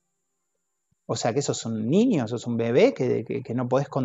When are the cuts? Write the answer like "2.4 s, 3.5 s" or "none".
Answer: none